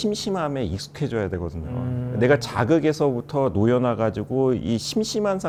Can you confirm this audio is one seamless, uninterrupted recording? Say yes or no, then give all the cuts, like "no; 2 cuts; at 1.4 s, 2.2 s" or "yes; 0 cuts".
yes; 0 cuts